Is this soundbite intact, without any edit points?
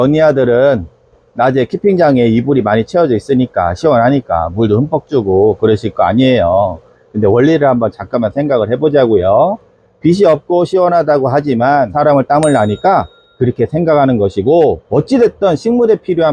yes; 0 cuts

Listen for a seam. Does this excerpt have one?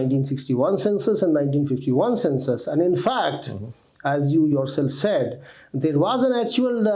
no; 0 cuts

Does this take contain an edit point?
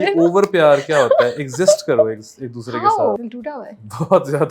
yes; 1 cut; at 3.3 s

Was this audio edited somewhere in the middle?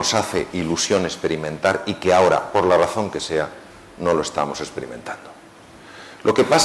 yes; 1 cut; at 2.3 s

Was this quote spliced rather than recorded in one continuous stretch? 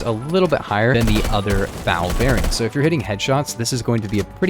yes; 1 cut; at 0.9 s

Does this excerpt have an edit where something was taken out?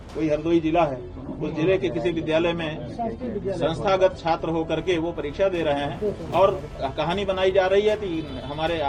no; 0 cuts

